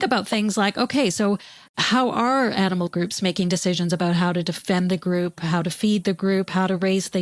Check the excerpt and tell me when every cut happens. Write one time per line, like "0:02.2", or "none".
0:04.6

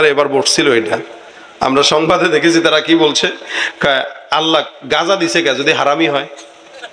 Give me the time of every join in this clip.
none

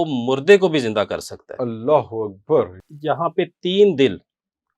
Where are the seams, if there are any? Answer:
0:02.8

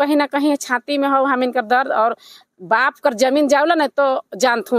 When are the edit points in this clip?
none

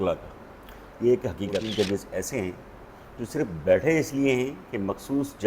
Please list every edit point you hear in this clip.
0:01.7

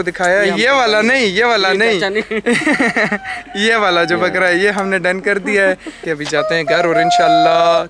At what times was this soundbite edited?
0:06.0

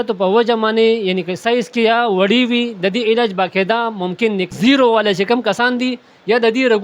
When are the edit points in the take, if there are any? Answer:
0:04.5

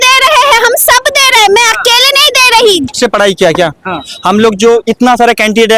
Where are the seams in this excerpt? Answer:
0:02.9

